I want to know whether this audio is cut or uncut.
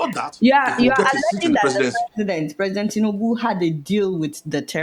uncut